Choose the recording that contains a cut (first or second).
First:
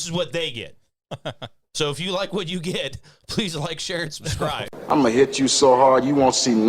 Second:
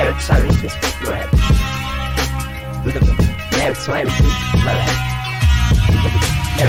first